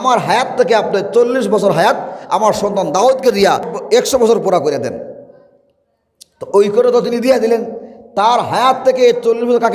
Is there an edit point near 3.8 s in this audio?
yes; 1 cut; at 3.8 s

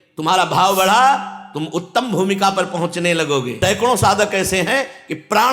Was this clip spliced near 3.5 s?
yes; 1 cut; at 3.5 s

